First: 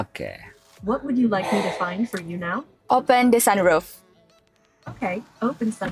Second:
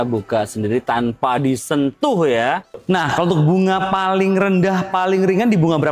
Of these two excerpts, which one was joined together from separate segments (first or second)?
second